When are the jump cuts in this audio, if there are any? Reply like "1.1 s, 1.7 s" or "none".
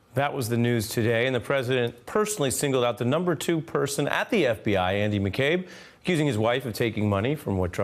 1.6 s